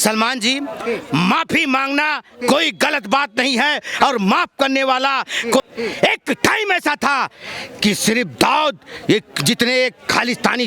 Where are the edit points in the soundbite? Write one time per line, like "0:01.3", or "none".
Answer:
0:05.6